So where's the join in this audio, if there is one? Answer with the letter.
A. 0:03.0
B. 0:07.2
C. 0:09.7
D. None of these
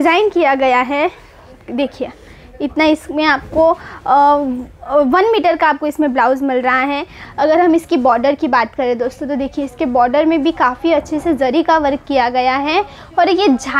B